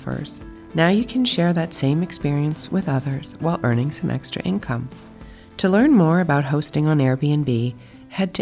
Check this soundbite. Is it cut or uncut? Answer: uncut